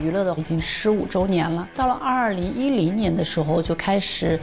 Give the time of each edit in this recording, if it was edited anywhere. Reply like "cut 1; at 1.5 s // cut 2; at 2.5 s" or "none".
cut 1; at 1.7 s